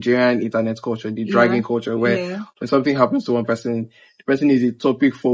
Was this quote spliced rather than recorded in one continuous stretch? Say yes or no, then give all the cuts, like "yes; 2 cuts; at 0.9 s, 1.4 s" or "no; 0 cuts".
no; 0 cuts